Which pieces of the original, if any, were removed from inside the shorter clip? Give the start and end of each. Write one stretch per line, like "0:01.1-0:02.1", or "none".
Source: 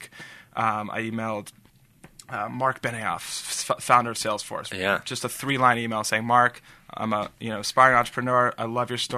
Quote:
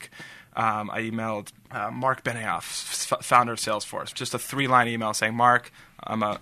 0:01.6-0:02.2
0:04.7-0:05.0

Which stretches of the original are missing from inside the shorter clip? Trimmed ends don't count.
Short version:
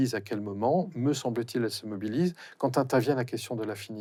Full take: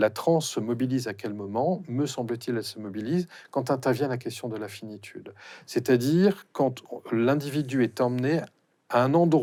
none

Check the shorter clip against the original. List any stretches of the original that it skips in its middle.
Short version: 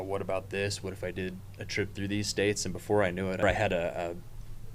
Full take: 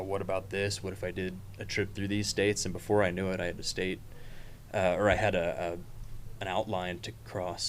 0:03.4-0:05.0

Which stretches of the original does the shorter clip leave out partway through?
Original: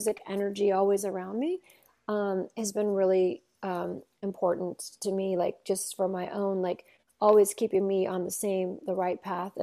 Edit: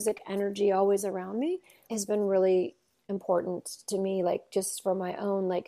0:01.9-0:02.6
0:03.5-0:04.0

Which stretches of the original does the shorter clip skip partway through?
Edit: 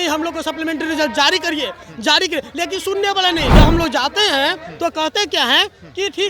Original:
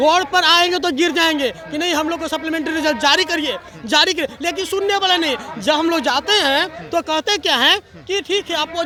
0:05.4-0:05.6

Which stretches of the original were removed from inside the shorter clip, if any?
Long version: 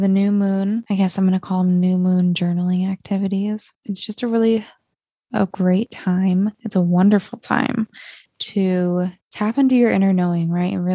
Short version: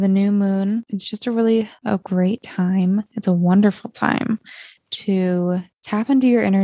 0:00.8-0:03.8
0:04.7-0:05.2

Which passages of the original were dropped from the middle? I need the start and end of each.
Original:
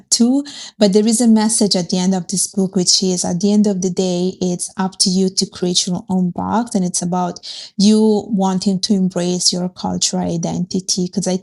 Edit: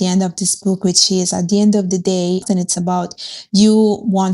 0:04.4-0:06.7

